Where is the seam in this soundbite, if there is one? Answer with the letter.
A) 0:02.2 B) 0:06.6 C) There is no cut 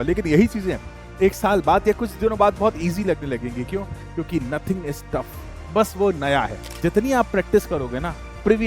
B